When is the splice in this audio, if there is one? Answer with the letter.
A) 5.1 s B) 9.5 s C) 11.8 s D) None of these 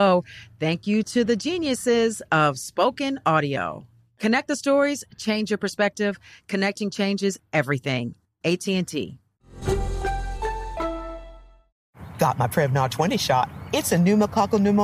C